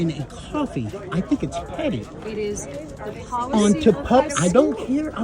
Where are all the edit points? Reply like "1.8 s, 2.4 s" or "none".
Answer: none